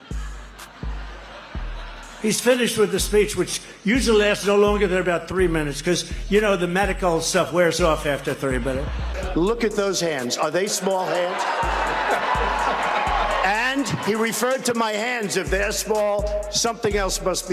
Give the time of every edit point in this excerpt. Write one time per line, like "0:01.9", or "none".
0:09.2